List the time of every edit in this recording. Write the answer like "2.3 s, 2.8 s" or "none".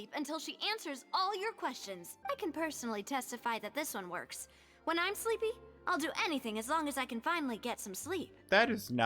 2.1 s